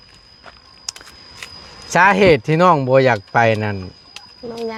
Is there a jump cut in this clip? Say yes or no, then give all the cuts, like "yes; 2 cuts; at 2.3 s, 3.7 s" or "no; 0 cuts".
no; 0 cuts